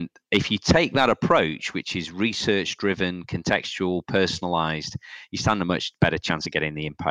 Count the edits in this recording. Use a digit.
0